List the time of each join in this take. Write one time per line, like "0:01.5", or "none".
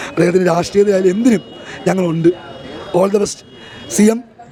none